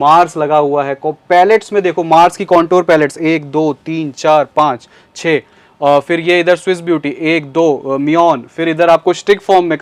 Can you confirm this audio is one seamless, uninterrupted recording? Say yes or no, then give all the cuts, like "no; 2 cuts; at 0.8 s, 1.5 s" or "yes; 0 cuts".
yes; 0 cuts